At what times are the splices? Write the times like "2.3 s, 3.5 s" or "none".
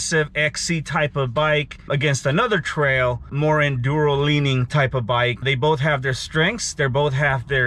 1.9 s, 3.3 s, 5.4 s